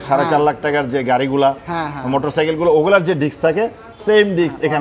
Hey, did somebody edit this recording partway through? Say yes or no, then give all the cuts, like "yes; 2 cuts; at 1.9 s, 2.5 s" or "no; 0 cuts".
no; 0 cuts